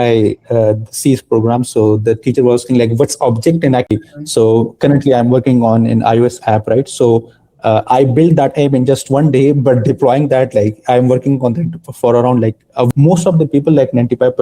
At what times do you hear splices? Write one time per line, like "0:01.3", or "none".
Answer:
0:03.9
0:12.9